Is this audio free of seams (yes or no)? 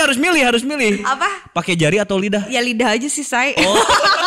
yes